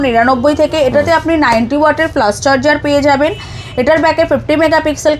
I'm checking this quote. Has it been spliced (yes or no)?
no